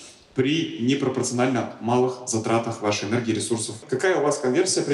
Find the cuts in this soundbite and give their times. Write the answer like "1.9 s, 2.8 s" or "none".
3.8 s